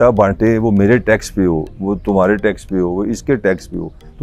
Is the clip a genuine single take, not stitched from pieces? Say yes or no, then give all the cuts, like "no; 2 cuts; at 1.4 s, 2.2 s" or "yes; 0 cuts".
yes; 0 cuts